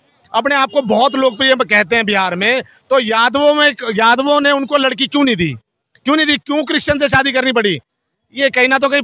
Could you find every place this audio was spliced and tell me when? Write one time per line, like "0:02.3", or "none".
none